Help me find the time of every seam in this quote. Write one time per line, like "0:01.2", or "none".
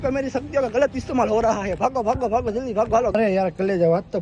0:01.8
0:03.1